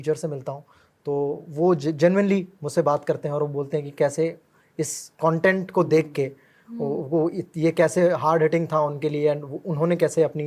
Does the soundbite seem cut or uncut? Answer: uncut